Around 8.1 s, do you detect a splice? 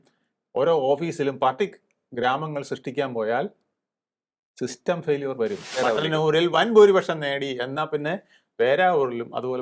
no; 1 cut; at 5.7 s

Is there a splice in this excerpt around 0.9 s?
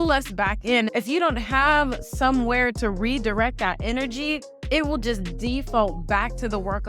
yes; 1 cut; at 0.9 s

